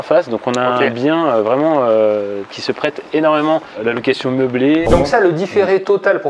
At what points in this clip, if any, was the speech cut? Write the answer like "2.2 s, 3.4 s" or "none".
4.9 s